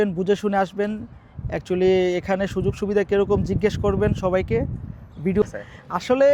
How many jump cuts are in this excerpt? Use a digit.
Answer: 1